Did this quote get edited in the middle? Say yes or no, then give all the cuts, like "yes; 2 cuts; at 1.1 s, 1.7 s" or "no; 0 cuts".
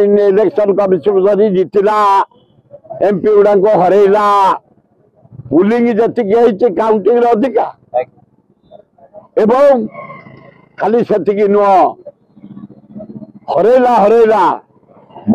no; 0 cuts